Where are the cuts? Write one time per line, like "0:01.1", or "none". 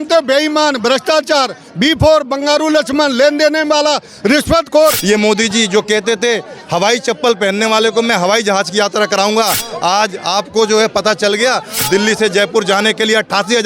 0:05.0